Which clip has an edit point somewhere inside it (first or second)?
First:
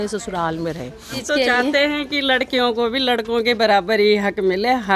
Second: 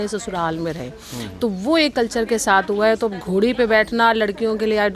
first